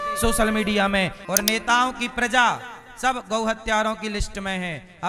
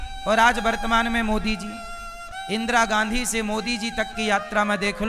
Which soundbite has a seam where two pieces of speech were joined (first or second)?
first